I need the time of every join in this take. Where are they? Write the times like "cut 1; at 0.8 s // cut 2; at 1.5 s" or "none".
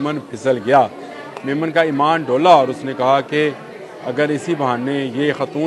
none